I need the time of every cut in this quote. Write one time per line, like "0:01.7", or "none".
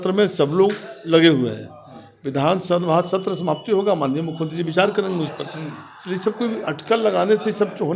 none